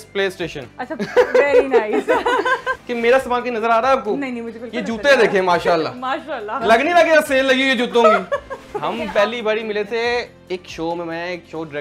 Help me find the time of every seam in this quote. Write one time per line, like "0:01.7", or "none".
0:02.7
0:08.6